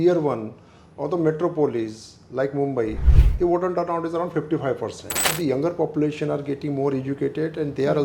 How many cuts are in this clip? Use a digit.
1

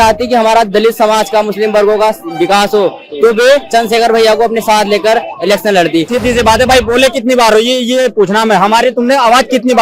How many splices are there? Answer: 1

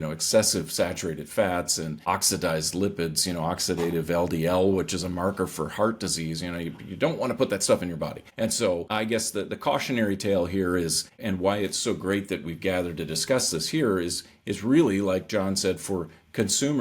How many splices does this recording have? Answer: 4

